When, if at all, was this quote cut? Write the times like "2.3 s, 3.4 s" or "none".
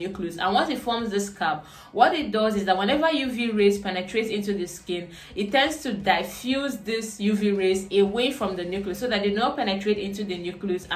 none